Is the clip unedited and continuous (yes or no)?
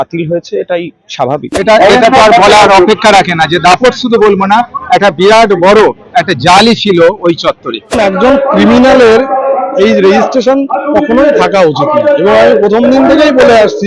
no